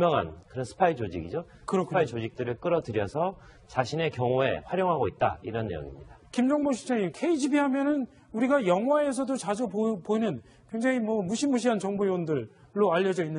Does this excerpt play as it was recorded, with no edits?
yes; 0 cuts

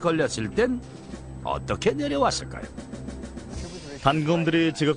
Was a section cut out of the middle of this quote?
yes; 1 cut; at 2.0 s

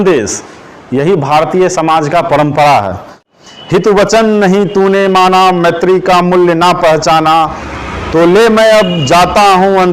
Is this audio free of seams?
no; 1 cut; at 3.3 s

